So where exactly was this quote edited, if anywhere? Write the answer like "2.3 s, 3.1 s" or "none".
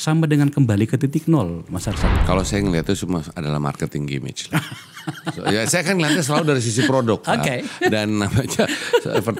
2.1 s